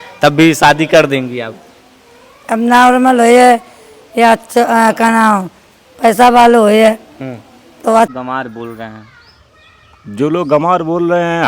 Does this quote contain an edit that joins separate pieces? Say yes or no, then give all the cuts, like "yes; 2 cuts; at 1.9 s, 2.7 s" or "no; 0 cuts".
yes; 1 cut; at 8.1 s